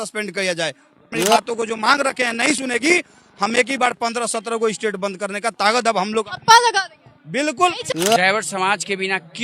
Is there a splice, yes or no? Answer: yes